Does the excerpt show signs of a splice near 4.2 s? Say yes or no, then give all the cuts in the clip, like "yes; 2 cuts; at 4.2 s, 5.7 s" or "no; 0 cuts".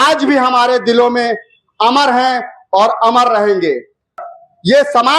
yes; 1 cut; at 4.2 s